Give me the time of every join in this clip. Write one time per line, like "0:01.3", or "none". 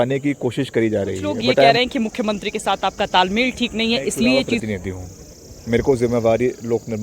0:01.7
0:04.6